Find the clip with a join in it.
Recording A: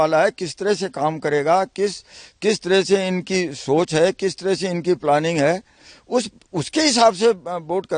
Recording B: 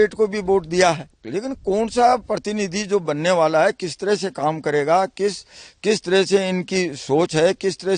B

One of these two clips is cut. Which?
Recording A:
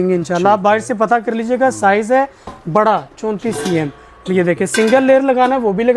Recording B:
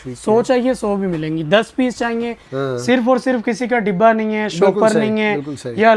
B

